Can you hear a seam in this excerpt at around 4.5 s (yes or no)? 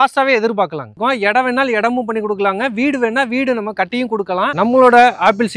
yes